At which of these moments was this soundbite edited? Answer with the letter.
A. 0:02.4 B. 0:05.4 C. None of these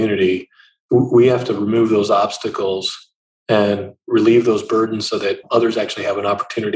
B